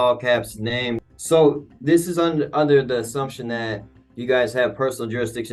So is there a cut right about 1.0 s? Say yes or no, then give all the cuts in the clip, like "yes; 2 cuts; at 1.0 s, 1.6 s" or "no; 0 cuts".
yes; 1 cut; at 1.0 s